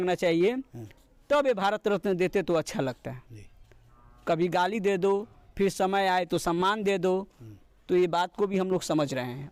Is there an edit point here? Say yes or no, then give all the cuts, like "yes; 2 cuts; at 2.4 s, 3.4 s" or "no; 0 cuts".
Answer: no; 0 cuts